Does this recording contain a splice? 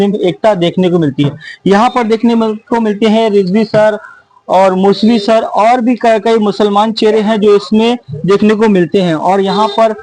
no; 0 cuts

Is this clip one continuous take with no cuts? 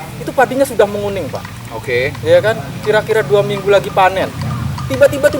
yes; 0 cuts

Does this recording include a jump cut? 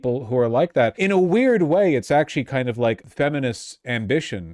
yes; 2 cuts; at 0.9 s, 3.0 s

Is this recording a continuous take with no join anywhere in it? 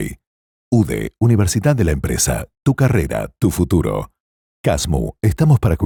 yes; 0 cuts

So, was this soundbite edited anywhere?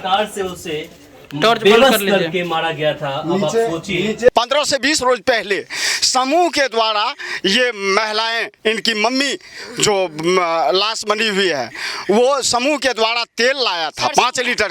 yes; 1 cut; at 4.3 s

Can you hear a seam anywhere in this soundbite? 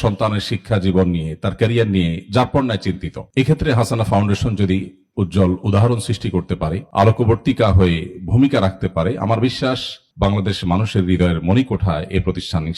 no; 0 cuts

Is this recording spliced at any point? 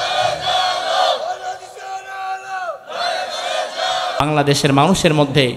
yes; 1 cut; at 4.2 s

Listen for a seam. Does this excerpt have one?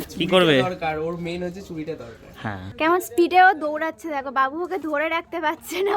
yes; 1 cut; at 2.7 s

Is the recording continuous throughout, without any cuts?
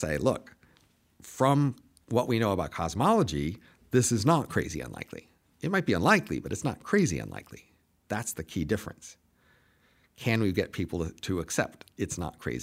yes; 0 cuts

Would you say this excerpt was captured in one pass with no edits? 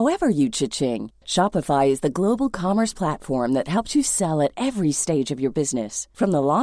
yes; 0 cuts

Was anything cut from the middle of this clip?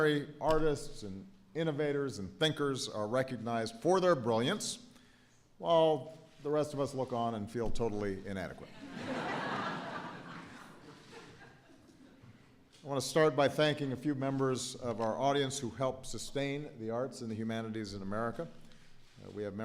yes; 1 cut; at 13.2 s

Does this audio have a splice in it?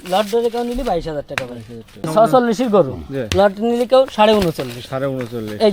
yes; 1 cut; at 2.1 s

